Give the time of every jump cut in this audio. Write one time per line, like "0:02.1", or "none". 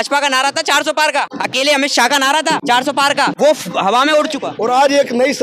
0:01.3
0:02.9
0:04.5

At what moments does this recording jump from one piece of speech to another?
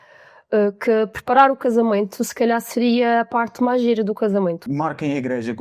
0:04.6

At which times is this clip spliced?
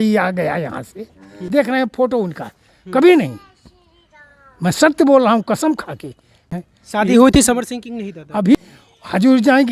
0:01.4
0:06.4
0:08.6

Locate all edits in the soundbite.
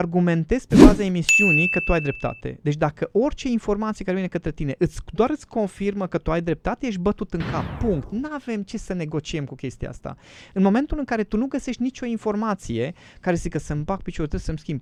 none

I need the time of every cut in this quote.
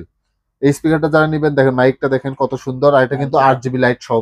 none

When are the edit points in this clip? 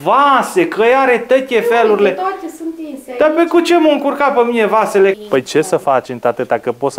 0:05.2

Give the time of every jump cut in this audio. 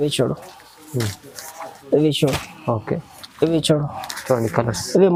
none

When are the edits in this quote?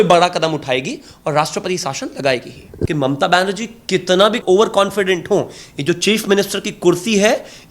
0:02.7

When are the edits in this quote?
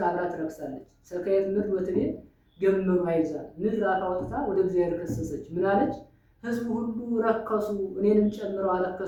none

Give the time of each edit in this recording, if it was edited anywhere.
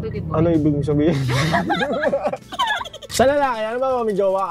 0:03.0

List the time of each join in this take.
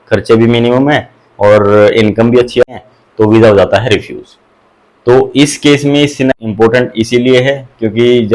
0:02.6
0:06.3

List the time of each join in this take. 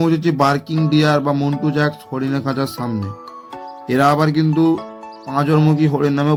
none

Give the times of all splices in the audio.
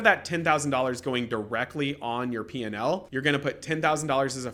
none

